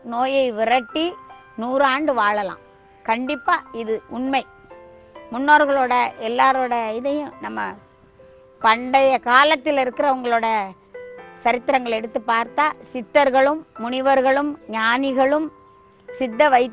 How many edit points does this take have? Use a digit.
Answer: 1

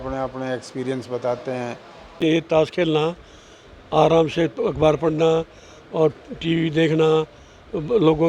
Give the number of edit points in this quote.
1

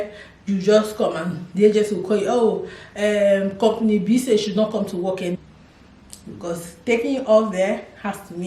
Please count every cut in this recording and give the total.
1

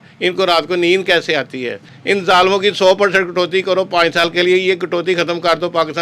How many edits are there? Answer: 1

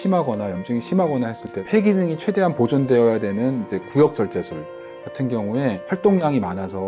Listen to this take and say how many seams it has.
2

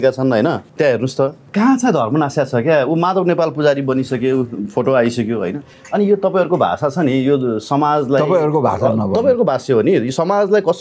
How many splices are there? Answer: 1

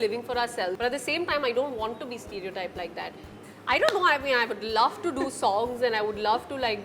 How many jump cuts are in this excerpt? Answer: 2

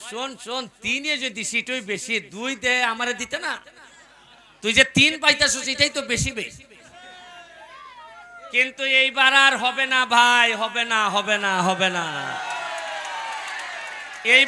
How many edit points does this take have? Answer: 0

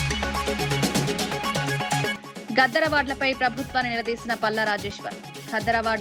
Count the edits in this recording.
1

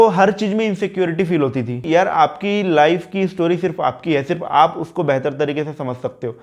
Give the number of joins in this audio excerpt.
1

